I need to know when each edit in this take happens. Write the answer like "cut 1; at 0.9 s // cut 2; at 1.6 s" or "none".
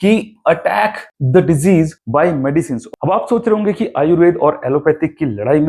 cut 1; at 2.8 s